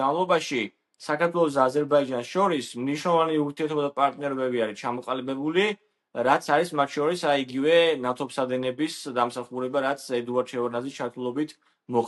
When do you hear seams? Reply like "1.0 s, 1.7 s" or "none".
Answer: none